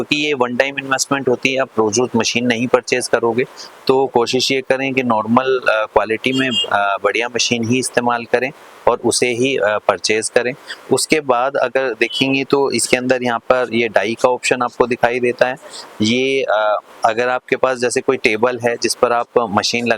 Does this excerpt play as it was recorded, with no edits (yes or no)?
yes